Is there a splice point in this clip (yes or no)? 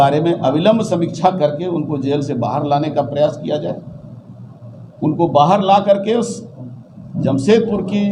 no